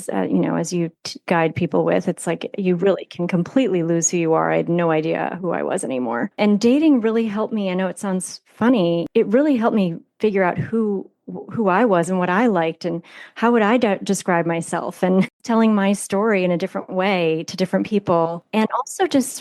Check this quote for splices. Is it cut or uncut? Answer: cut